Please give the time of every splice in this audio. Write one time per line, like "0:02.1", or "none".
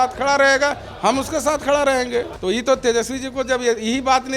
0:02.3